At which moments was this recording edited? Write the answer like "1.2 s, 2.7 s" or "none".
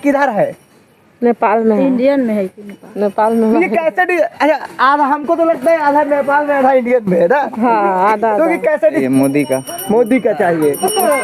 9.0 s

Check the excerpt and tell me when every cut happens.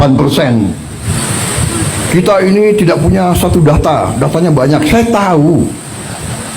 1.1 s

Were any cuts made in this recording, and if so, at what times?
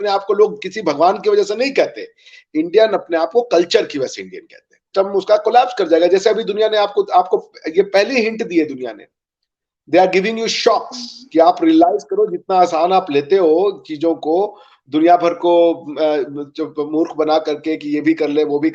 4.9 s

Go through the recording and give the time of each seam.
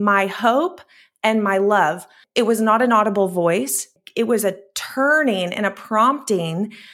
2.1 s, 3.9 s

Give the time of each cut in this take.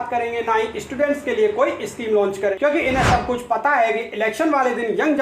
2.5 s

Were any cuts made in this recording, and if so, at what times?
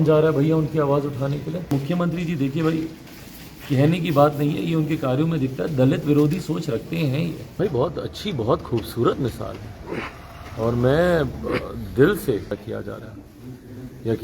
1.7 s, 7.4 s, 12.7 s

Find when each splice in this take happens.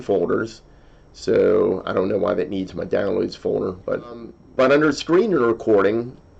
4.4 s

